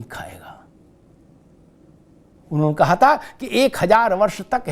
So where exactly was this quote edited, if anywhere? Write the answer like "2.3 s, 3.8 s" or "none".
none